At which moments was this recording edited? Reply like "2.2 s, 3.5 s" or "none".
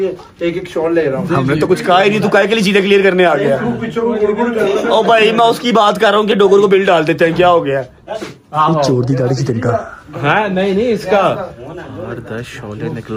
none